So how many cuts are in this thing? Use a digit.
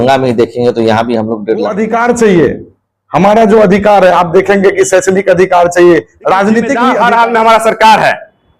2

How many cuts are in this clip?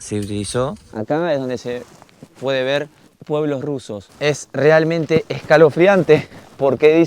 3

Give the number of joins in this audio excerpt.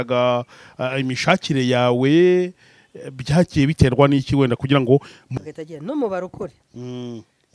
1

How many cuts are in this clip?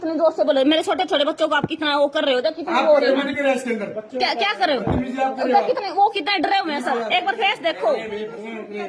0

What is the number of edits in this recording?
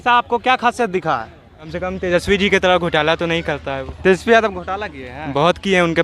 1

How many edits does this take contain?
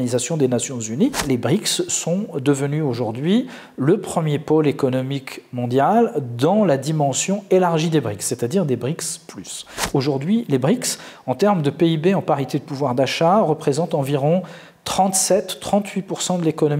2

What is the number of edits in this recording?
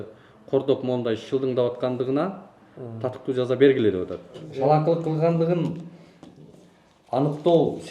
1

